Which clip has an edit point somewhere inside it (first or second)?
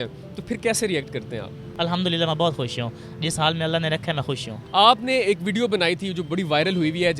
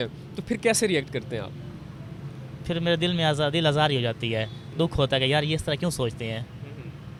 first